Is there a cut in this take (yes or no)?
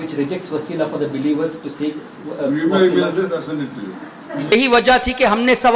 yes